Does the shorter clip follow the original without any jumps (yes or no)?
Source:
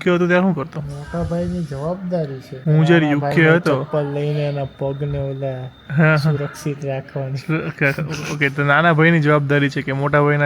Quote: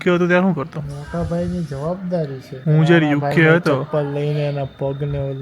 yes